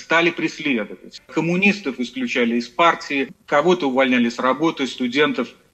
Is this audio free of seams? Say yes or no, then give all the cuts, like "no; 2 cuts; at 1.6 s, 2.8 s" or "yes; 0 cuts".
no; 1 cut; at 1.1 s